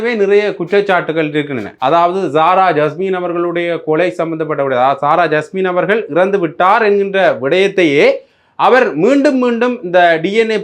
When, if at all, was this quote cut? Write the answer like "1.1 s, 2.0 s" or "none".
1.6 s